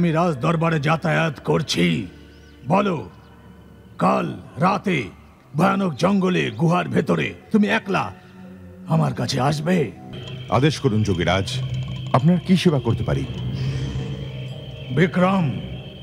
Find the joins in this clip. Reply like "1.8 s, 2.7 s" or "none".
10.2 s